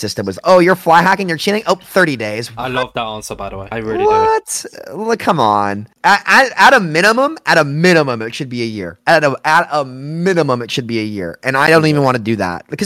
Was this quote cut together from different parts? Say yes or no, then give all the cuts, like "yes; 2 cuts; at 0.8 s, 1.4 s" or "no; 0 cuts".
no; 0 cuts